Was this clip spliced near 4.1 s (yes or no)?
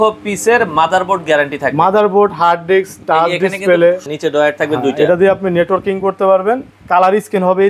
yes